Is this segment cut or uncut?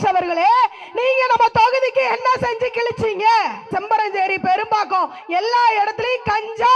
cut